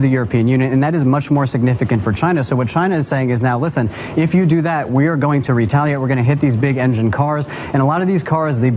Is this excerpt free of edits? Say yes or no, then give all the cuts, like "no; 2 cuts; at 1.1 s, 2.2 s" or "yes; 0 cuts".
yes; 0 cuts